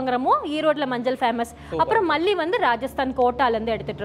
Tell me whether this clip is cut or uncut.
uncut